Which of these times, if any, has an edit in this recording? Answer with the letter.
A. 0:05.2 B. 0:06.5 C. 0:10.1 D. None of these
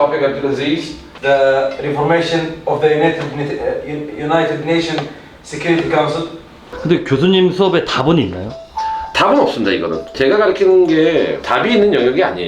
B